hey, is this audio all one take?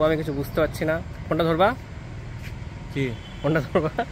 yes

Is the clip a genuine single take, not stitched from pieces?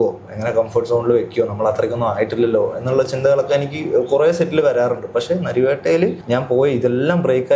no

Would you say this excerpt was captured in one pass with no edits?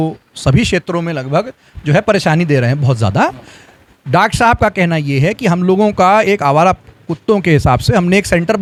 yes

